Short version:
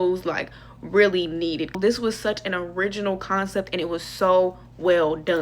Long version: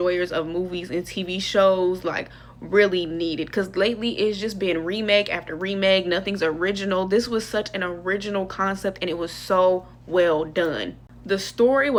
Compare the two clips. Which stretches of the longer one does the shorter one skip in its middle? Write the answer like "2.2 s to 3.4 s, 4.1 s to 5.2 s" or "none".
3.5 s to 7.0 s

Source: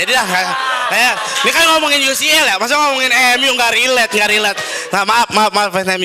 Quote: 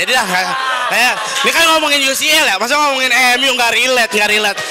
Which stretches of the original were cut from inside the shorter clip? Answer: none

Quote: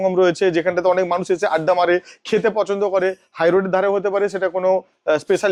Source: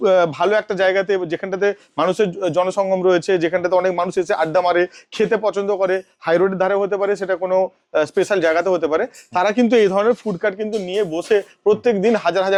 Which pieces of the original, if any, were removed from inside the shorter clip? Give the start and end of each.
none

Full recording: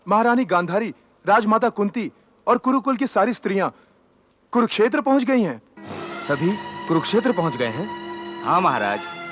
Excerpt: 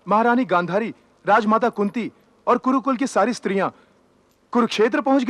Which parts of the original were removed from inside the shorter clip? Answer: none

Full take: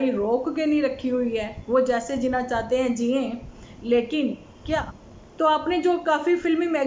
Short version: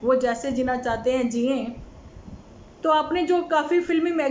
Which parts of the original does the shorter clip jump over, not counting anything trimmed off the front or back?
3.9 s to 4.8 s

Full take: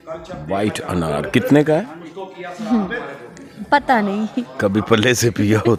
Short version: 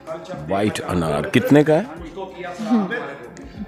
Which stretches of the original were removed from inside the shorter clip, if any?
none

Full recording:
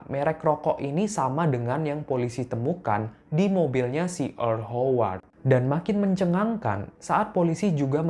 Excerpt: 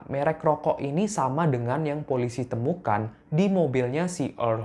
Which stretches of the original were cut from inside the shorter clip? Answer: none

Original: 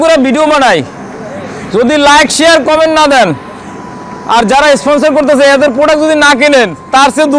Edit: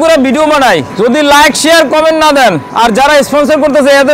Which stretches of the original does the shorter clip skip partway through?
0.9 s to 1.6 s, 3.4 s to 4.2 s

